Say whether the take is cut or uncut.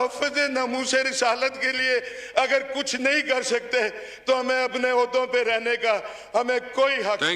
uncut